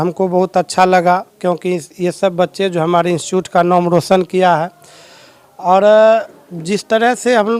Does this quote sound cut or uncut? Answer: uncut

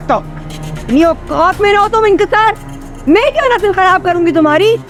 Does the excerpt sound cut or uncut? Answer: uncut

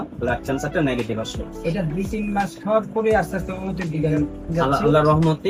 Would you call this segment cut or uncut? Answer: uncut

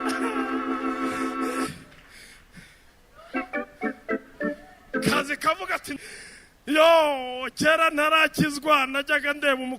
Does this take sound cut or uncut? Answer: cut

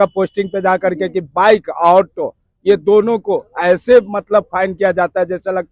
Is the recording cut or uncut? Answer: uncut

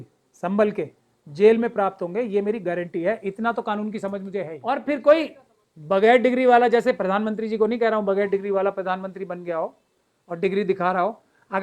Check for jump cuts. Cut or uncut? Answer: cut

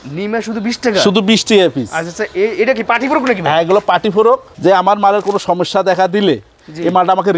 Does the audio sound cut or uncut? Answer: cut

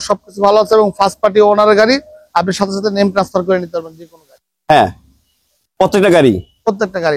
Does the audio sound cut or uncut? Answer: uncut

